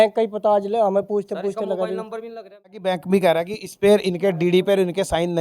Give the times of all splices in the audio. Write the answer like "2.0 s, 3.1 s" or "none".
2.8 s